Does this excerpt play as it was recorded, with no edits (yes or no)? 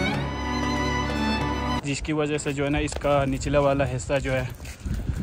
no